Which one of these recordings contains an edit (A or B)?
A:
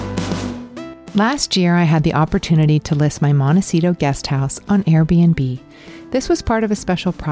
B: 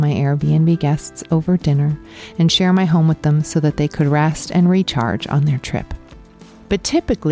A